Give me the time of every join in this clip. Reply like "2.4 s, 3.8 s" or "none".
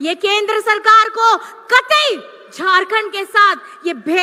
none